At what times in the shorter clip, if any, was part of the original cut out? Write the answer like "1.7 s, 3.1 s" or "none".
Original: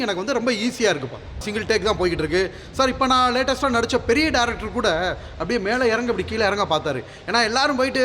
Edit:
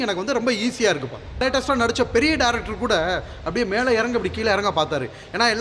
1.4 s